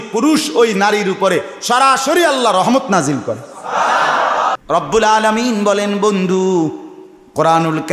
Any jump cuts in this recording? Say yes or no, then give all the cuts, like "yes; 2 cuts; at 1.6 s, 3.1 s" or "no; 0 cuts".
yes; 1 cut; at 4.5 s